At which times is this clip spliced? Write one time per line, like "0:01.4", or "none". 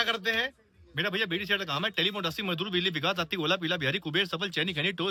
none